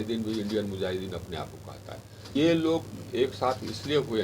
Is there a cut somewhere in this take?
yes; 1 cut; at 2.3 s

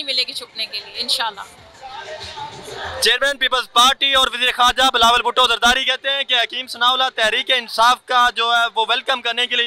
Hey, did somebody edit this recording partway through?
no; 0 cuts

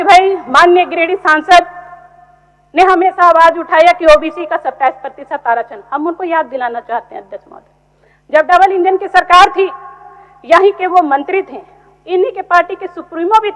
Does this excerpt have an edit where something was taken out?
no; 0 cuts

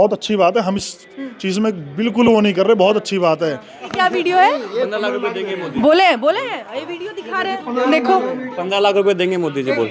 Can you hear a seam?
yes; 1 cut; at 3.8 s

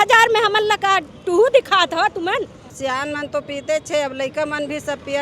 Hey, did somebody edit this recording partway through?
yes; 1 cut; at 2.6 s

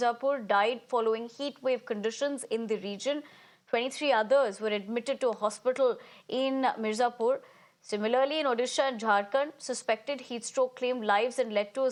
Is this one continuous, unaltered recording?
yes; 0 cuts

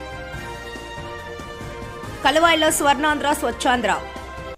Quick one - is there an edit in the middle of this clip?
yes; 1 cut; at 1.9 s

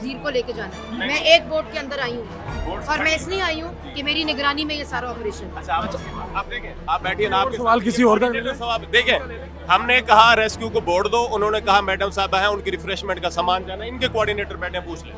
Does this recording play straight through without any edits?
yes; 0 cuts

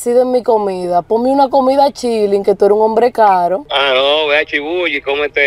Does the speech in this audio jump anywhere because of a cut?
yes; 1 cut; at 3.6 s

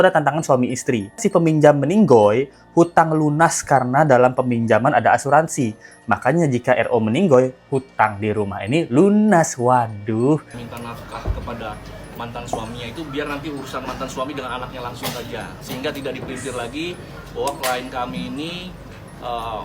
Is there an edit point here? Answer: yes; 2 cuts; at 1.2 s, 10.6 s

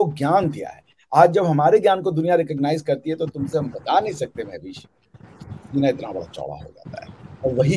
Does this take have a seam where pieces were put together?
no; 0 cuts

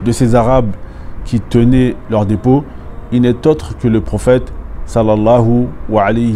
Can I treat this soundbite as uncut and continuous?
yes; 0 cuts

